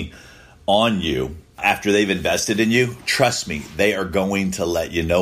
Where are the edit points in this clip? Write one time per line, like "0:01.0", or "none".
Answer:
0:01.6